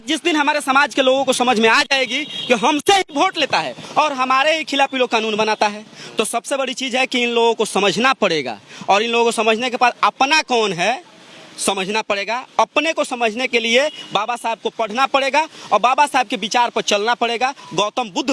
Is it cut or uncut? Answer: uncut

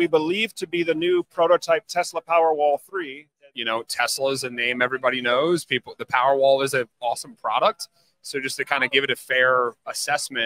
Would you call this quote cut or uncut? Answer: cut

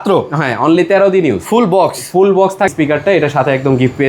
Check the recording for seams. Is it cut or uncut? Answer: cut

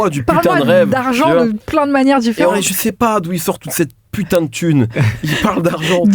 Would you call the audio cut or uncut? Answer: cut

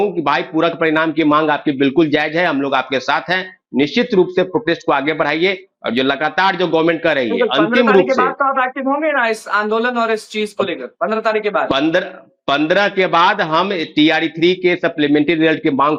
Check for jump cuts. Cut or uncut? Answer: uncut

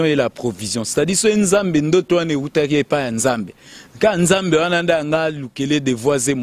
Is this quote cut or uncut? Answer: uncut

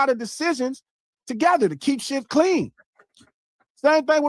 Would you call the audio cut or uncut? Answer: uncut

